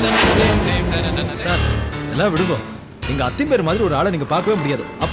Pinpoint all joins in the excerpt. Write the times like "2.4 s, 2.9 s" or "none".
1.4 s